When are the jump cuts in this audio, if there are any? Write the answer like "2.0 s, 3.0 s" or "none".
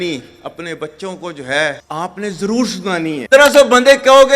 3.3 s